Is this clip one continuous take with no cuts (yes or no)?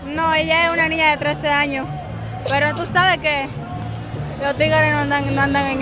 yes